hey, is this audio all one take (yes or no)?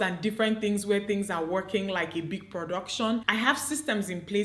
yes